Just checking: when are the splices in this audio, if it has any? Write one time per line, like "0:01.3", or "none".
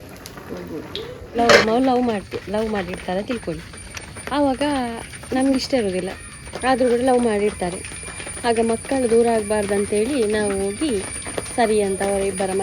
0:01.6